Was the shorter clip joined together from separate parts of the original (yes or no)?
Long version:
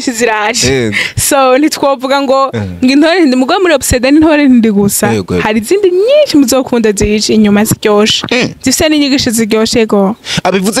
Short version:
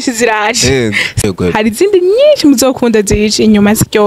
yes